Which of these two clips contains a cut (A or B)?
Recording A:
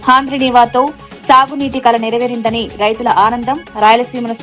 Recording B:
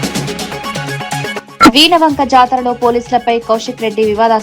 B